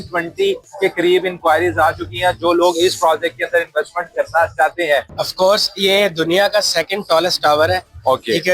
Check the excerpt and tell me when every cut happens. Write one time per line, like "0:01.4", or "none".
0:05.1